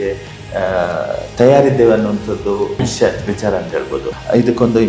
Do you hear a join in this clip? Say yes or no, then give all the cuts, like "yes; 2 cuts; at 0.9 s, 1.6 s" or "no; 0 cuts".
yes; 2 cuts; at 2.7 s, 4.1 s